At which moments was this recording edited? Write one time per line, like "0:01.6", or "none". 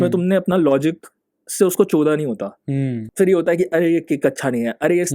0:03.0